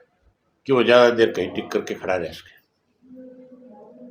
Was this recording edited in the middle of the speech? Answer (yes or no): no